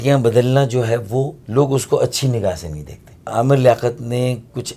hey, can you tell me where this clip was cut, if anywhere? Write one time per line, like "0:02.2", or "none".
0:01.4
0:03.3